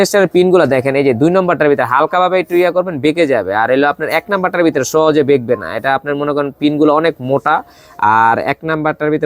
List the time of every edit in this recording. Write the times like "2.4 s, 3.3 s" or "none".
none